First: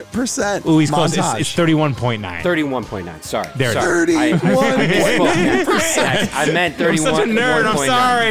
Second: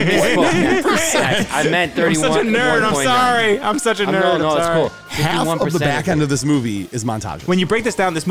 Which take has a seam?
second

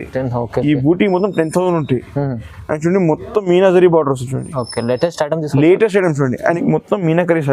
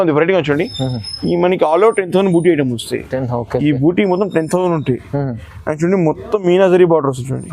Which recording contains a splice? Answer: first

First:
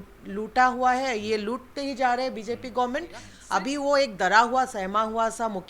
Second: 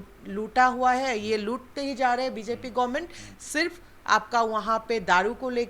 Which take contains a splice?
first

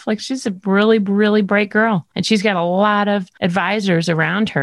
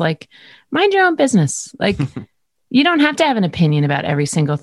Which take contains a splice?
first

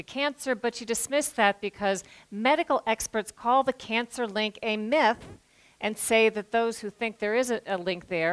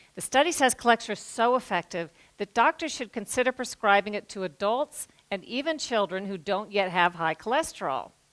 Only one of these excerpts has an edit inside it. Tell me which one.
second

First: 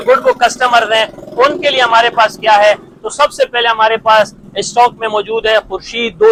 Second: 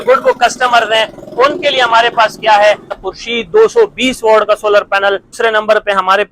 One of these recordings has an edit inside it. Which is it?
second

